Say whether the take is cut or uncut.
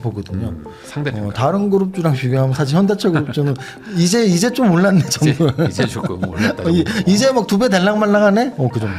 uncut